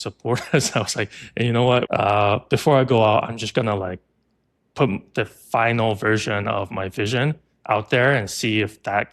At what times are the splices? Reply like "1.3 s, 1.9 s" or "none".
1.9 s